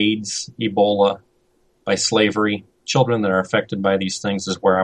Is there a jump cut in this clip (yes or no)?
no